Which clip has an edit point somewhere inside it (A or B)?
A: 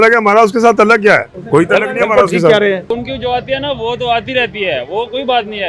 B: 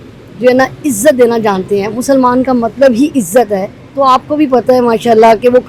A